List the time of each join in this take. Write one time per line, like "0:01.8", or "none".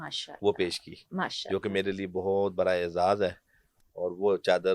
none